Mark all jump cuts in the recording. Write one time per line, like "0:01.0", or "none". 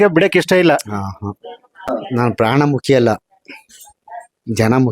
0:02.0